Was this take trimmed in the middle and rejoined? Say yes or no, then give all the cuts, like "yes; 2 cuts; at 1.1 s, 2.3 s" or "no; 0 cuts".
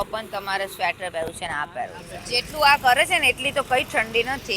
yes; 1 cut; at 2.1 s